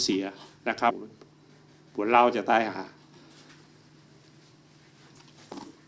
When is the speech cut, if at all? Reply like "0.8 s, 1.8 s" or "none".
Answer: 1.0 s